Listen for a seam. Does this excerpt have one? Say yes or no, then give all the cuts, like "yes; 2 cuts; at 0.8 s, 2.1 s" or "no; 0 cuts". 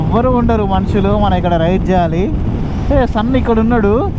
yes; 1 cut; at 2.6 s